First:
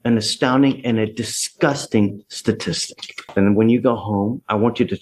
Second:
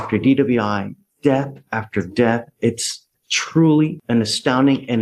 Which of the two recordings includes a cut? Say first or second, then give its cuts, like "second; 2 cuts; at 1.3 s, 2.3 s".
first; 1 cut; at 3.3 s